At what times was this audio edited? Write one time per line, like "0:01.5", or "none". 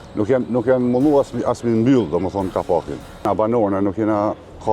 0:03.2